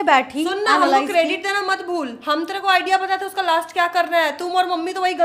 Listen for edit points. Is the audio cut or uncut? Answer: cut